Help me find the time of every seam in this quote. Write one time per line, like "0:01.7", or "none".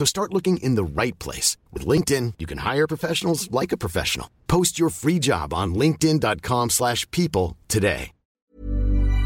0:08.3